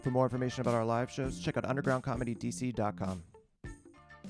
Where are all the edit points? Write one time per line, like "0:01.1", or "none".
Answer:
0:03.3